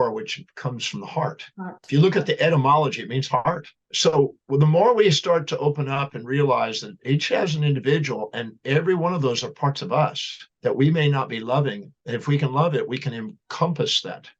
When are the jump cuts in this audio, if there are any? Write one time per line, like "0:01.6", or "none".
0:03.7